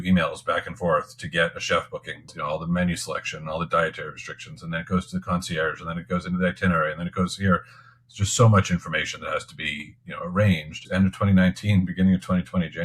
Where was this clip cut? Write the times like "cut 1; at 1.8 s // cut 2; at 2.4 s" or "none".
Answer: cut 1; at 2.3 s // cut 2; at 10.7 s